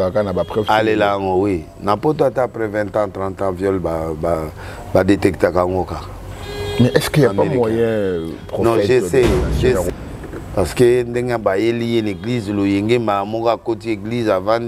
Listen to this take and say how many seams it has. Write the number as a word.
one